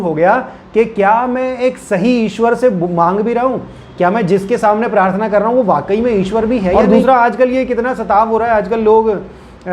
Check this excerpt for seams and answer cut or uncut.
cut